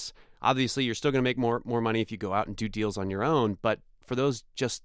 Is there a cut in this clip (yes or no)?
no